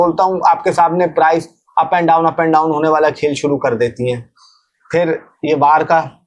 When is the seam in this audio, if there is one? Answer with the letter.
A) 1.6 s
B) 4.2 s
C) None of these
C